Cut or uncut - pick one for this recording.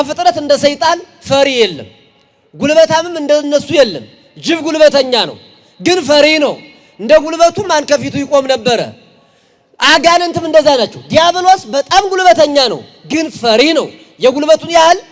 uncut